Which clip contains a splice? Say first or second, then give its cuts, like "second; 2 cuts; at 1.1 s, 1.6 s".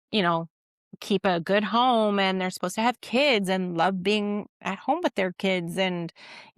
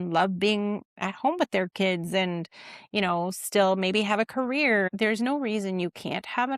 second; 1 cut; at 4.9 s